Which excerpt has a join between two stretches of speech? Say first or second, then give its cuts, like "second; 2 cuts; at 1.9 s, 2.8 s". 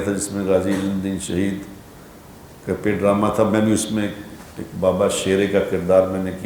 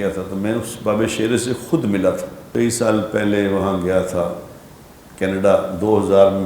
second; 1 cut; at 2.3 s